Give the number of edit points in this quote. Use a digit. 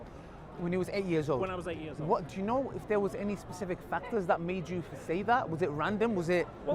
0